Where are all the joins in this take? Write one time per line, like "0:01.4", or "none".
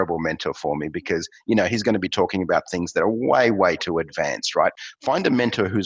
0:04.7